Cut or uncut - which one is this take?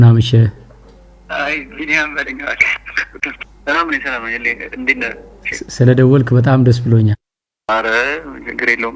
uncut